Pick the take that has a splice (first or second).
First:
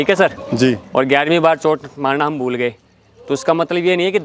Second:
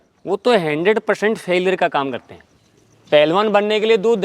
second